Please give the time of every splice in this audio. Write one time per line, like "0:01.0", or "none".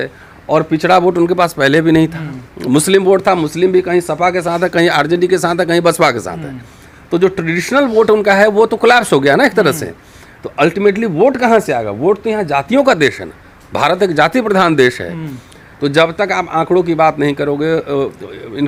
none